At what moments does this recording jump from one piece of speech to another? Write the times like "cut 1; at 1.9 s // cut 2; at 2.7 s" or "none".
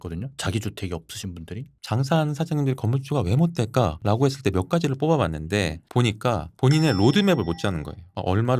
cut 1; at 1.7 s